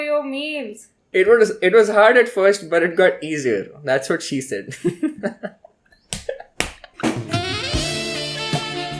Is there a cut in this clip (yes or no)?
no